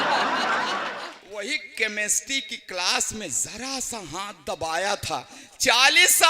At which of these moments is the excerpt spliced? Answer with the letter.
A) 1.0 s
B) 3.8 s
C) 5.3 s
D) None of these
A